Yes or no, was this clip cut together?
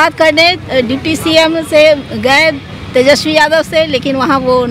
no